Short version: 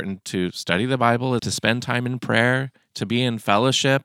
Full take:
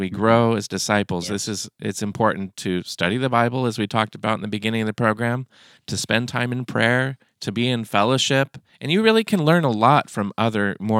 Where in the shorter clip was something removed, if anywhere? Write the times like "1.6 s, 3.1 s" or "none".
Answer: 1.4 s